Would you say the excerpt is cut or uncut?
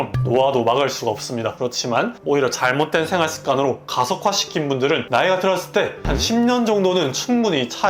cut